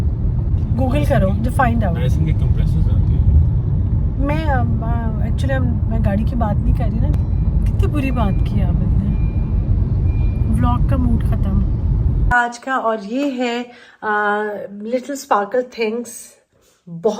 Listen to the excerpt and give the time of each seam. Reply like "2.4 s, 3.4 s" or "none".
7.1 s, 12.3 s